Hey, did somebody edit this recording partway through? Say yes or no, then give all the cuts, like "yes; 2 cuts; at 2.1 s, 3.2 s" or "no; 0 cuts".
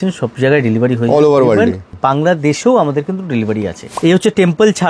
yes; 2 cuts; at 1.9 s, 3.9 s